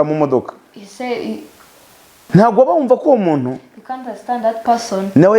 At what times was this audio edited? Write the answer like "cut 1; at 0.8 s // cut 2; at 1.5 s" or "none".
cut 1; at 2.3 s